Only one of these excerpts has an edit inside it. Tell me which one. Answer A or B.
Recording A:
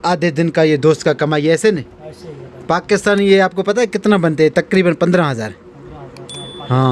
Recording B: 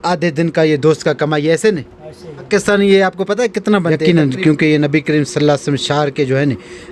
B